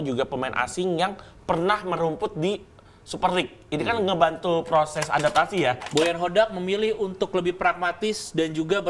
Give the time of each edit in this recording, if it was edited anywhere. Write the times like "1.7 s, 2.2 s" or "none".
5.8 s